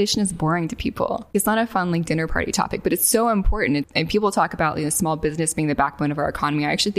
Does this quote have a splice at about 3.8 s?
yes; 2 cuts; at 1.3 s, 3.8 s

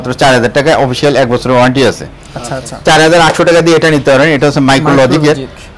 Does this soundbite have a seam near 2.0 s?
no; 0 cuts

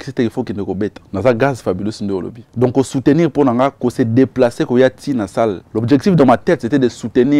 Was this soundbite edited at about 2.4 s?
yes; 3 cuts; at 1.0 s, 2.4 s, 5.7 s

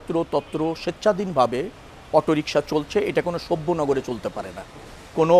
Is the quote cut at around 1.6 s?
no; 0 cuts

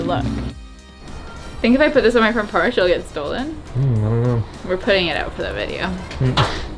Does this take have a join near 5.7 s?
no; 2 cuts; at 0.7 s, 3.6 s

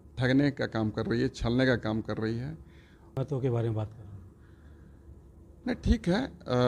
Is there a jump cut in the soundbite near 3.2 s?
yes; 1 cut; at 3.2 s

